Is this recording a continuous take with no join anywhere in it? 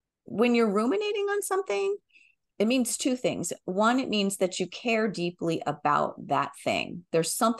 yes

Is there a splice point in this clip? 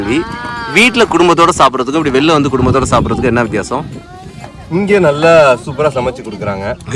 no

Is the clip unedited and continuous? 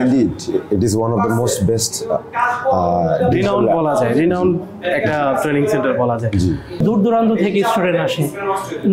no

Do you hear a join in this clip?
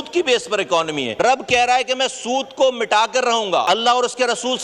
yes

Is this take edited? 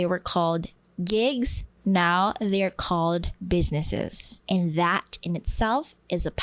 yes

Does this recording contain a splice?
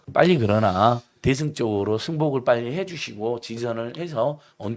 no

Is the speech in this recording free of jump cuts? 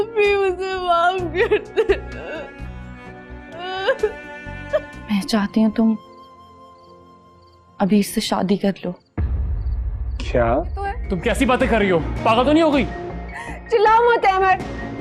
no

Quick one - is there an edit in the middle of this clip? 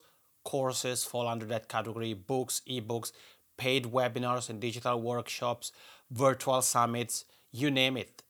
no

